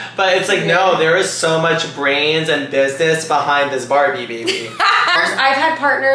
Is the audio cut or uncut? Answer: cut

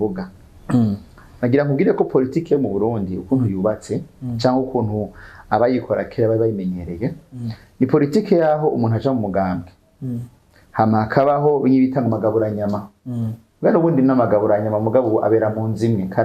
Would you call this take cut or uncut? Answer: uncut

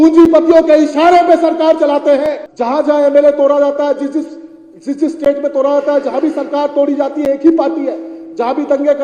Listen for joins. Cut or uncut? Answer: cut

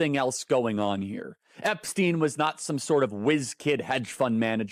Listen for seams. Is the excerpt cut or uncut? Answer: uncut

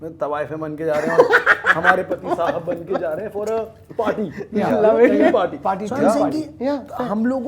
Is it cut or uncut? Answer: uncut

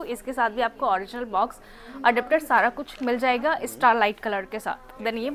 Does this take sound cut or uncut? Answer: uncut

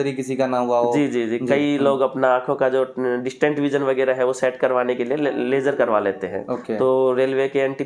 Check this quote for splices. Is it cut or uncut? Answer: uncut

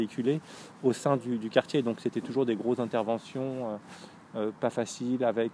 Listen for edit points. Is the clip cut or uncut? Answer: uncut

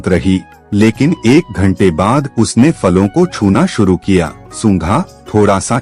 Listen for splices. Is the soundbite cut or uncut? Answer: uncut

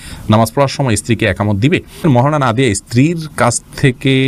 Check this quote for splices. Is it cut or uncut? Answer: cut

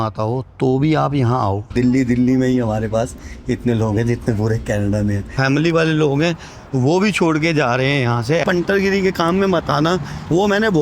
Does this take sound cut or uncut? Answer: cut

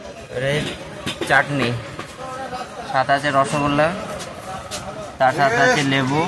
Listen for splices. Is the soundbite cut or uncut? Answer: uncut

